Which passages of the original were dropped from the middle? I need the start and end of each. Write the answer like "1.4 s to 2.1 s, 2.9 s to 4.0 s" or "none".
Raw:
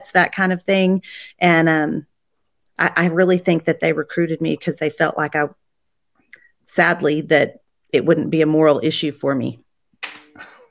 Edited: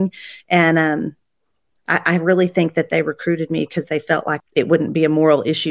5.2 s to 7.7 s